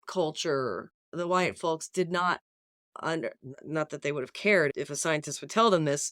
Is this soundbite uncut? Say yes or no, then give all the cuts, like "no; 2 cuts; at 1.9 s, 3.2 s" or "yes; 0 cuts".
no; 2 cuts; at 1.1 s, 4.8 s